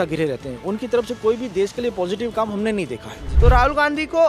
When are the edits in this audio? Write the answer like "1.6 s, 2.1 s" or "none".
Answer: 3.2 s